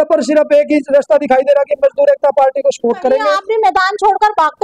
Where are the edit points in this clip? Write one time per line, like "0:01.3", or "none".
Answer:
0:03.4